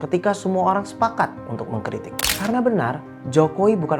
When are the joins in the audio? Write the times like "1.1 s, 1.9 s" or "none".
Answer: 2.2 s

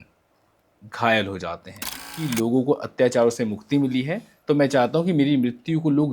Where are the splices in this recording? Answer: 2.2 s

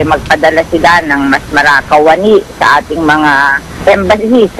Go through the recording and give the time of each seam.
1.8 s, 3.7 s

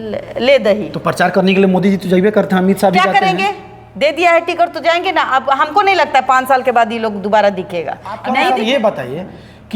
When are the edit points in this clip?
8.2 s

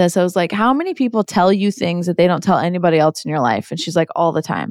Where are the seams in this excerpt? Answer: none

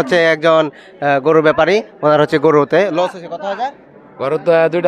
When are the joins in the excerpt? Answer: none

